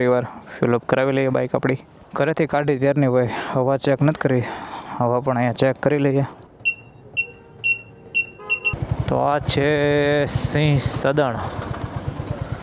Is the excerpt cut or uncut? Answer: cut